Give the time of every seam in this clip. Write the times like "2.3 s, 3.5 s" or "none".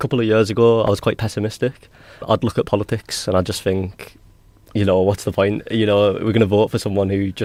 none